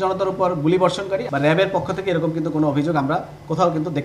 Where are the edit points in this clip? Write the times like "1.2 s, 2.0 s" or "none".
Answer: 1.2 s

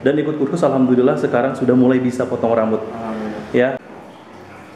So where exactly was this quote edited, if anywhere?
3.8 s

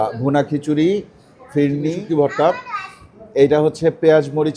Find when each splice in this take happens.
1.9 s

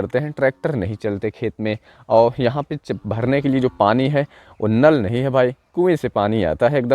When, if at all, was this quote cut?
none

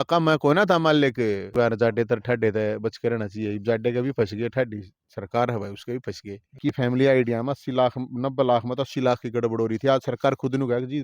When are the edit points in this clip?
1.5 s, 6.6 s

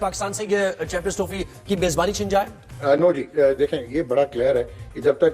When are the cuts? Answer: 2.6 s

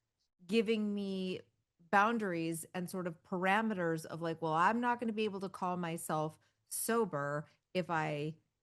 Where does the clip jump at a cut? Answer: none

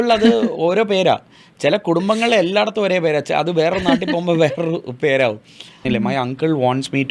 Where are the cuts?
5.8 s

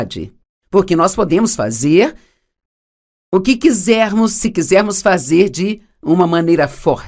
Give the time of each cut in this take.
none

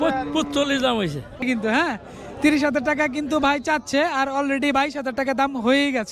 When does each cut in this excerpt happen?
1.4 s

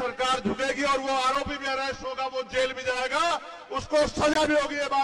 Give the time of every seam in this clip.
none

